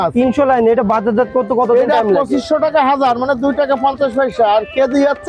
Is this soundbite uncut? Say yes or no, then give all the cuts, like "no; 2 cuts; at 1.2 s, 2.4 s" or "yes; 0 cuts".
yes; 0 cuts